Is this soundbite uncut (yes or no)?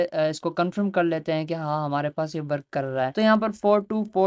no